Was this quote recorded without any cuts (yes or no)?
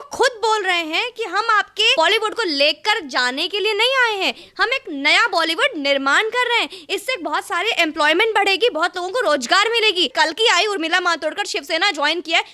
no